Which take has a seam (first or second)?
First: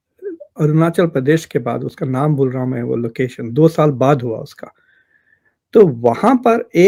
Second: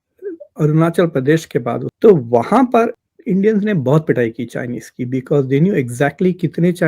second